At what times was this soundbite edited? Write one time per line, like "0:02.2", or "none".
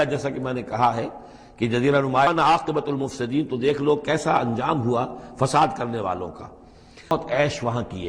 0:02.3
0:07.1